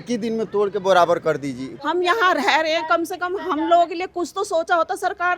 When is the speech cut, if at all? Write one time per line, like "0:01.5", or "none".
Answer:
0:01.7